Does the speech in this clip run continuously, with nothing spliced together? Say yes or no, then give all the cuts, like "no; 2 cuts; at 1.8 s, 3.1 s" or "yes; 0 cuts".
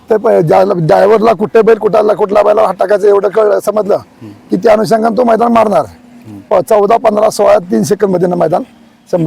yes; 0 cuts